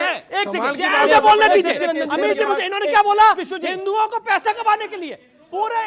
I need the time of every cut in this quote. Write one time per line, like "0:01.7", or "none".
0:01.0